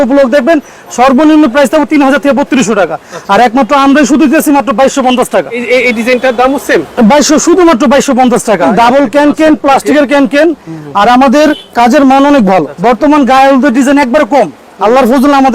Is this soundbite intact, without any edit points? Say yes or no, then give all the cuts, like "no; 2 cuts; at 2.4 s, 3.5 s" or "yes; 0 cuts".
no; 3 cuts; at 5.6 s, 8.7 s, 12.7 s